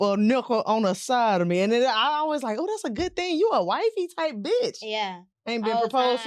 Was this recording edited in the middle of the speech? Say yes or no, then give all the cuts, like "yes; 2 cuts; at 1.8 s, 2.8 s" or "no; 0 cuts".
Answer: no; 0 cuts